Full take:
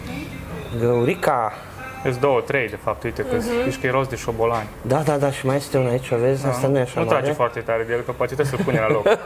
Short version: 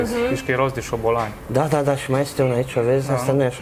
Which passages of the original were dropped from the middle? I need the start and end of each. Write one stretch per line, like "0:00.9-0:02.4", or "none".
none

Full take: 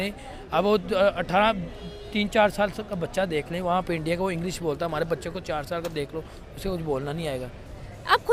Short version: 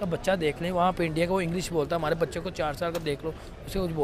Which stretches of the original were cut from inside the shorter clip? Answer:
none

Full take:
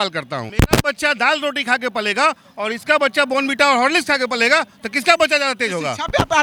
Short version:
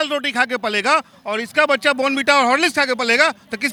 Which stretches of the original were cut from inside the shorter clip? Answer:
none

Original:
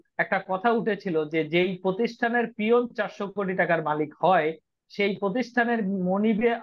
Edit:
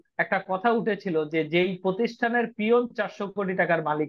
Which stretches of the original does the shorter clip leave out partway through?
none

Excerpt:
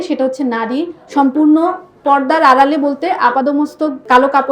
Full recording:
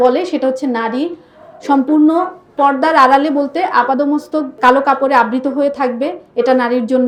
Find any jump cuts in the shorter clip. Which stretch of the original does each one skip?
0:01.2-0:01.5

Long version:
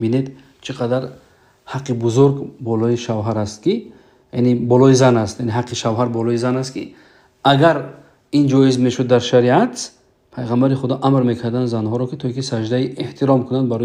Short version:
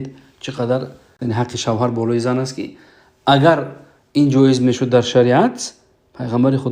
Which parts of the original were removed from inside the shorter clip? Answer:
0:01.4-0:05.4

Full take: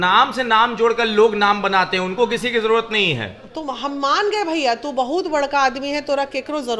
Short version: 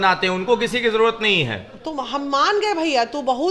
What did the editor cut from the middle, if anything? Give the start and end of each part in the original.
none

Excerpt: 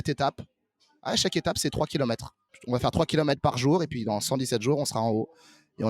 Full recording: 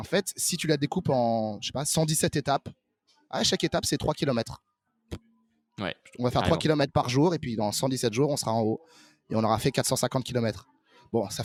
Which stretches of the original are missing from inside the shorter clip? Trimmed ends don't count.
0:04.8-0:06.0

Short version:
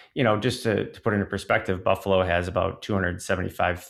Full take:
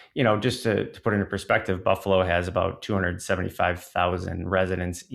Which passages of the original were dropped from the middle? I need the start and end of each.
none

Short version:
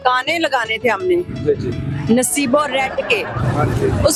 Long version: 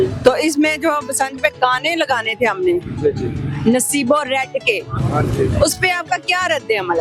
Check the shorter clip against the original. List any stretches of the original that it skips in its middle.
none

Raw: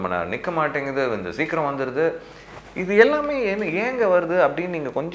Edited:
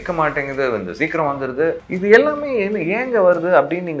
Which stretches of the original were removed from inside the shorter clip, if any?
0:02.2-0:02.7

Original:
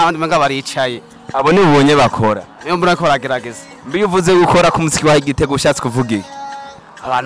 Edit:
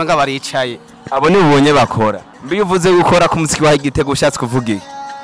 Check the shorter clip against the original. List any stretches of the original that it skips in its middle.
0:02.5-0:03.7

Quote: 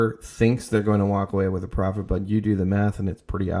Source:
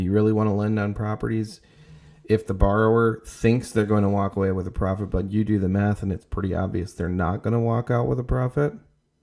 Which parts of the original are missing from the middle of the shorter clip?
none

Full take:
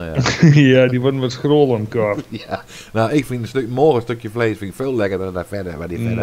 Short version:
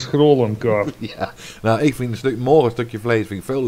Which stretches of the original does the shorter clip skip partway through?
none

